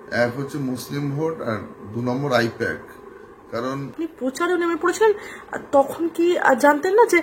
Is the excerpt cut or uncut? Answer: cut